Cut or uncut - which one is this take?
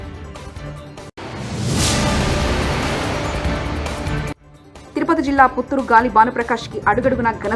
cut